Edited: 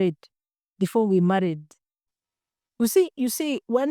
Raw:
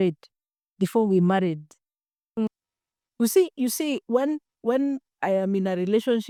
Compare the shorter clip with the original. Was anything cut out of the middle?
yes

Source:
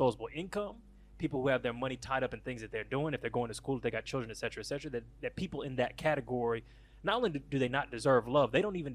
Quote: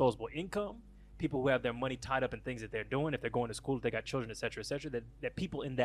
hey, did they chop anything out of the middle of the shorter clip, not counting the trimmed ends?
no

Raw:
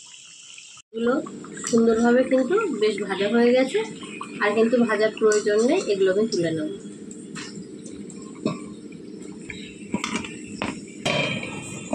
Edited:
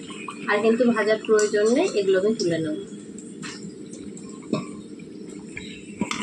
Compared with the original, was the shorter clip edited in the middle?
no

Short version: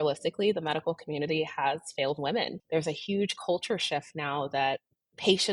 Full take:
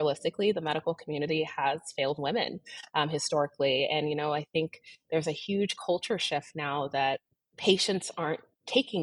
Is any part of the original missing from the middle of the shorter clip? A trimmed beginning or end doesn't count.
yes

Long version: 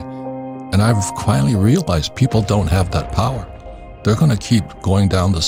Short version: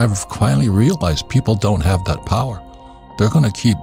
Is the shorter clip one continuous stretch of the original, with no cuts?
yes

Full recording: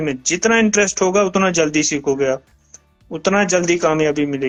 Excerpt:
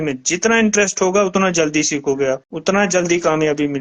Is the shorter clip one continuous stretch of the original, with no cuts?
no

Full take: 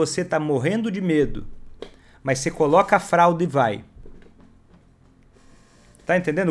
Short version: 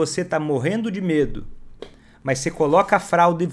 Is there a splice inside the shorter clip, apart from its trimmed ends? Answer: no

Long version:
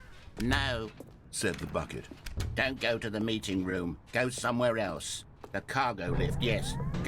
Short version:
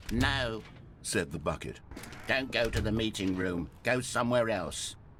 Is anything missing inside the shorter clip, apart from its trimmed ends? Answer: no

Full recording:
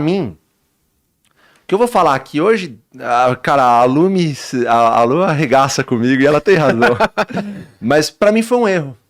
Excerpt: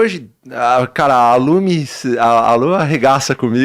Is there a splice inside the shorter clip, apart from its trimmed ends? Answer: no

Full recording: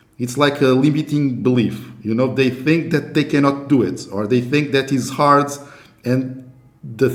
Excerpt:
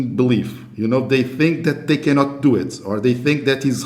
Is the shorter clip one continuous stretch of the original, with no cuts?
yes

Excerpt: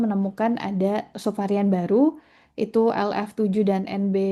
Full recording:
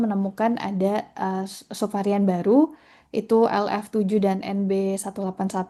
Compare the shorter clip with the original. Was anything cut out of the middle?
yes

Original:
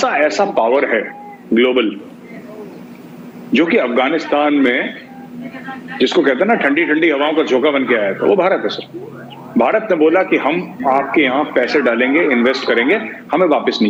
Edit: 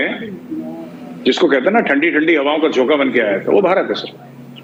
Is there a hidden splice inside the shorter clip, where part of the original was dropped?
no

